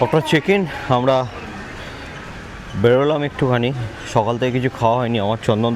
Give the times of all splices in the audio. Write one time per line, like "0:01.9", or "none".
none